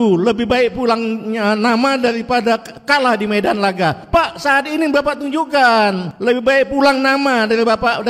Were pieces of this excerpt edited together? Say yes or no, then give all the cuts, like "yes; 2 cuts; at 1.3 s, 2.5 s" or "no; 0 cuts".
yes; 3 cuts; at 2.7 s, 4.0 s, 6.1 s